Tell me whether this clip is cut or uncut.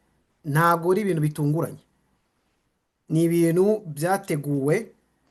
uncut